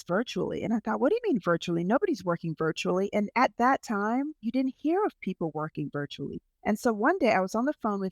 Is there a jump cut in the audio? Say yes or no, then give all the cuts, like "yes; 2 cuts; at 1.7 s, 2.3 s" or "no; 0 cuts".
yes; 2 cuts; at 4.4 s, 6.5 s